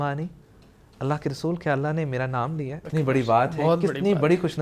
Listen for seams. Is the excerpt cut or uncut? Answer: cut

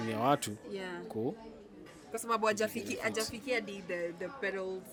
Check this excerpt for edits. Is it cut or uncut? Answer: uncut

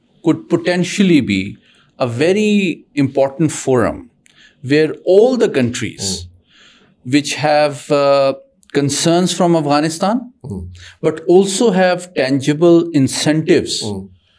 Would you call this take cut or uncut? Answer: uncut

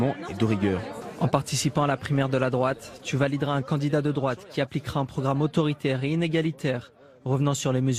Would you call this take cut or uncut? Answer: uncut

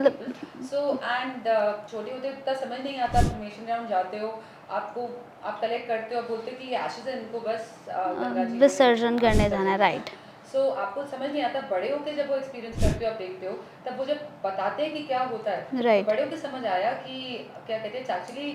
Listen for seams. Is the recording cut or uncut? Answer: uncut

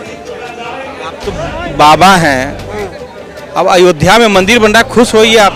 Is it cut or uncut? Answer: uncut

